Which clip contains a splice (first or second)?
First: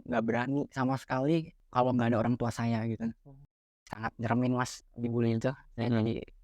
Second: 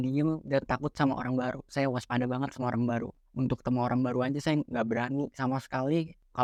first